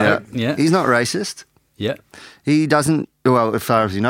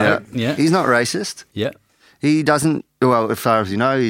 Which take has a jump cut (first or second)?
second